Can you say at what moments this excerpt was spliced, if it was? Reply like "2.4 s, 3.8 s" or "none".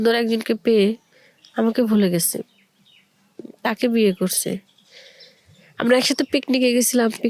none

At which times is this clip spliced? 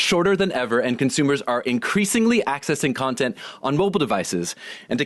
none

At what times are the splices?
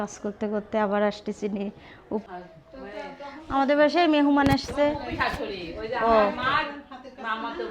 2.2 s

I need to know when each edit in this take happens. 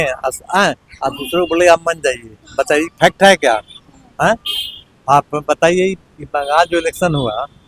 none

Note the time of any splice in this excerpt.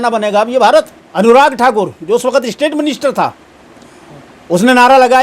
1.0 s

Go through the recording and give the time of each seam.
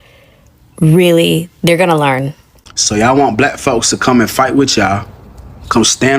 2.8 s

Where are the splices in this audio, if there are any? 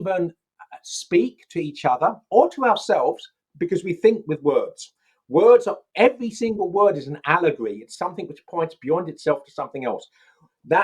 none

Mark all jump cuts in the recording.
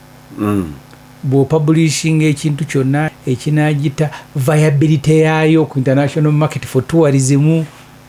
3.1 s

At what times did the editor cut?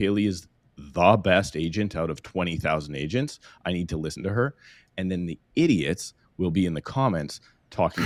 none

